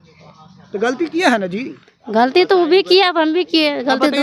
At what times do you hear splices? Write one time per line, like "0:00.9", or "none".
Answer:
none